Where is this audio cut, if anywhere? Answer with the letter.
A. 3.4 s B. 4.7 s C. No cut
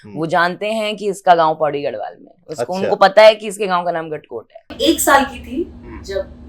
B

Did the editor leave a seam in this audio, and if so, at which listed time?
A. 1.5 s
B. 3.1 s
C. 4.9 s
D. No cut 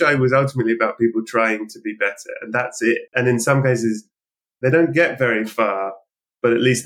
B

